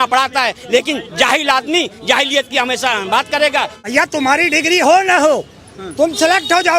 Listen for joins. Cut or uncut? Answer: cut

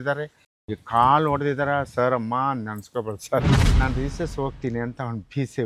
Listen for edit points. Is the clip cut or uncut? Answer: cut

